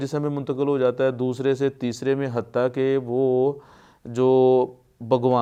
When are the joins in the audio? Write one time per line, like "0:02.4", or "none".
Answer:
none